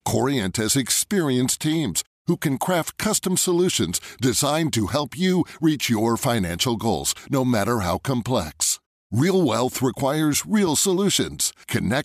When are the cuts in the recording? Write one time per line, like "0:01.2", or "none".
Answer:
none